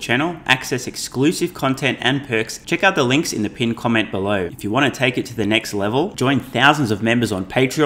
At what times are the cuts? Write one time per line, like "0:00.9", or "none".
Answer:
0:02.6
0:04.5